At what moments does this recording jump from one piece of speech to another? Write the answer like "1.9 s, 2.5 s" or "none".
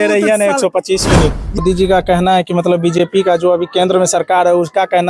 1.6 s